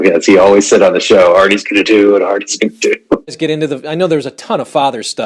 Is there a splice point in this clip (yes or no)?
yes